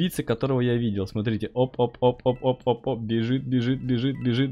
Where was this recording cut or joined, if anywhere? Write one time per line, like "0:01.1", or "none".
none